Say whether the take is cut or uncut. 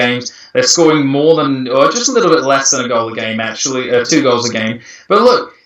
cut